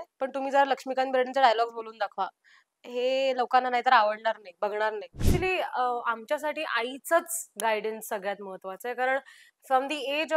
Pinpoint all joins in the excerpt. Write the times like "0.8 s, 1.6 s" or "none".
5.2 s